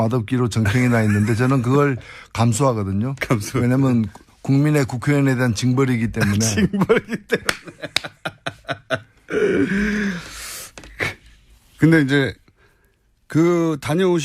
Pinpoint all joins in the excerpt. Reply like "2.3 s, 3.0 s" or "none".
none